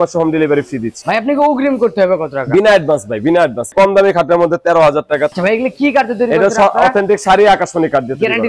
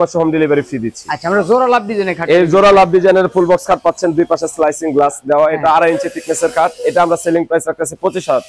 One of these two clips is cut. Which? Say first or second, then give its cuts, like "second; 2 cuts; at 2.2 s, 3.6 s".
first; 3 cuts; at 0.9 s, 3.7 s, 5.3 s